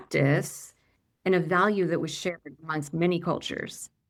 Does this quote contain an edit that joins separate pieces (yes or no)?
no